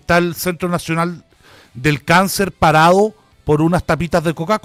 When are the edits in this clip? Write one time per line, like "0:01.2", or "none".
none